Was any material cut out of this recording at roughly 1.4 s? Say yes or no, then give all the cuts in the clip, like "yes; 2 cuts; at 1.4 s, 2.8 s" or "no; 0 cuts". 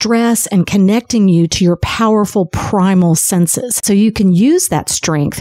no; 1 cut; at 3.8 s